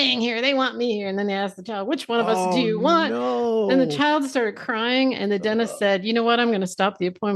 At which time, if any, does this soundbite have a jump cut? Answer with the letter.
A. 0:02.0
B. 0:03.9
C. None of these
A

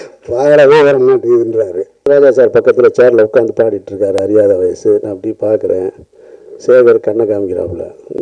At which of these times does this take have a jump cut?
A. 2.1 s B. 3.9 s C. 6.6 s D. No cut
A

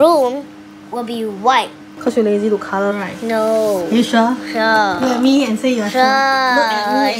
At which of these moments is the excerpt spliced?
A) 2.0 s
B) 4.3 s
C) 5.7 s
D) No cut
A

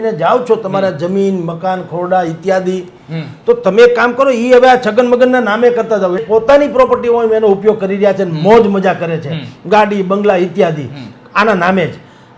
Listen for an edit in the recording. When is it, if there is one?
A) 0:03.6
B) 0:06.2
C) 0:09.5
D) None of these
B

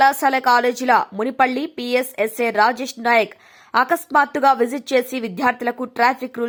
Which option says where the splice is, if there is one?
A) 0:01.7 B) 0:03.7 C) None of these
C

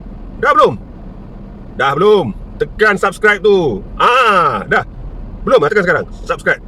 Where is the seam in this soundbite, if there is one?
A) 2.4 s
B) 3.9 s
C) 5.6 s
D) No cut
D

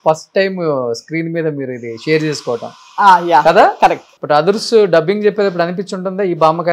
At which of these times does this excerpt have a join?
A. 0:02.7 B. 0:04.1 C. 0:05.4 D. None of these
B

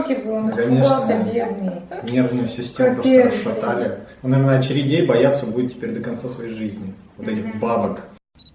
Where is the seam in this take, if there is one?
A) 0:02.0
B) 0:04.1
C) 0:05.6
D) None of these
D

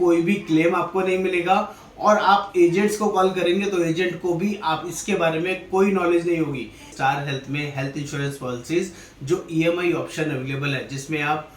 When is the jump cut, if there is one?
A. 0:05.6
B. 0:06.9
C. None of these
B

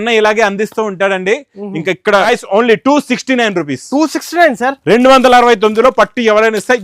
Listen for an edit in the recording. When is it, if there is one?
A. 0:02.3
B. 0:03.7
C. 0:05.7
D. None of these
A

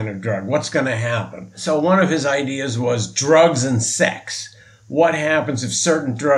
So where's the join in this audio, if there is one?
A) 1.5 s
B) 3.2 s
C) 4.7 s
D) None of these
A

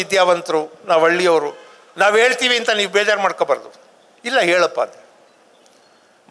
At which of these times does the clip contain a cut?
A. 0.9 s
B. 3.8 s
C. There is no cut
C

